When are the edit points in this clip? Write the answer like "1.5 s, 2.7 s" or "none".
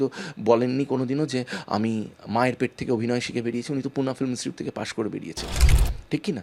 none

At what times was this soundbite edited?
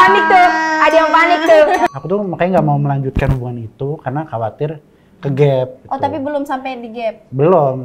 1.9 s

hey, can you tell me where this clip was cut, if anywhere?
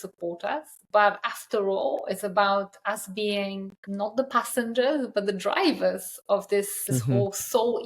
3.8 s, 6.8 s

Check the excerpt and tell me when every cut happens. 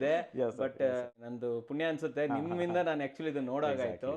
1.1 s

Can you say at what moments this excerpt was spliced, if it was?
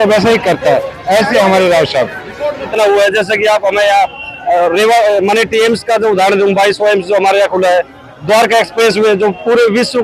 2.7 s

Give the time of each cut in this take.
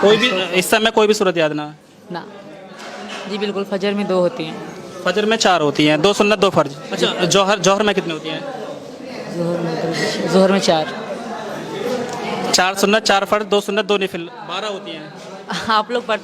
2.4 s, 6.8 s

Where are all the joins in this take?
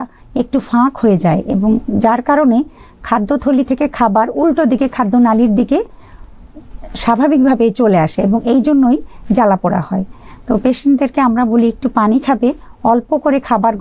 none

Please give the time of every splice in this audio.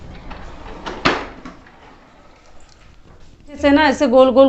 3.6 s

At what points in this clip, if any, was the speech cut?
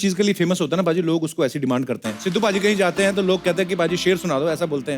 2.1 s

